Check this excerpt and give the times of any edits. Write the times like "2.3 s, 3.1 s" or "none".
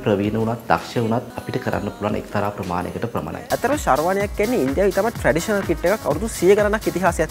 1.3 s, 3.4 s